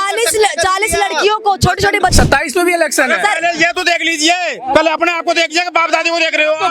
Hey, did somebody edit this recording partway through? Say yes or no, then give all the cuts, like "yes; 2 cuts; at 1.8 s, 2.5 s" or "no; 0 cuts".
yes; 1 cut; at 2.1 s